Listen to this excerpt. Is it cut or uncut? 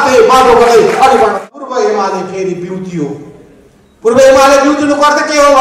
cut